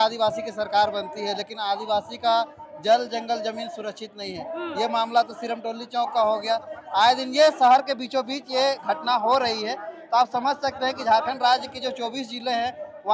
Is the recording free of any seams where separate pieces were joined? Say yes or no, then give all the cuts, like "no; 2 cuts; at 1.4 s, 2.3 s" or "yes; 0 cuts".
yes; 0 cuts